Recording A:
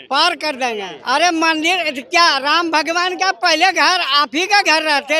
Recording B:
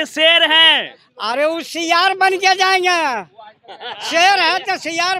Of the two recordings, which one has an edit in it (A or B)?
A